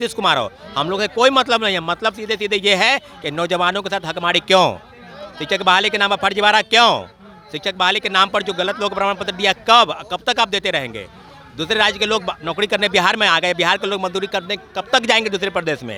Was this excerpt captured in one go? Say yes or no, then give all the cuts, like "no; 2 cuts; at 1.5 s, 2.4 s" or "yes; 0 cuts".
yes; 0 cuts